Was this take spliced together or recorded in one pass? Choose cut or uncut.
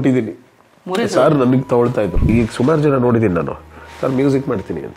cut